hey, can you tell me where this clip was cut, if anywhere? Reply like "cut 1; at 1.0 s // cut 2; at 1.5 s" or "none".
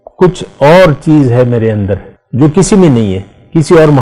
cut 1; at 2.2 s